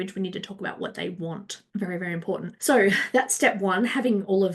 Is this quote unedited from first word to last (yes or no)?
no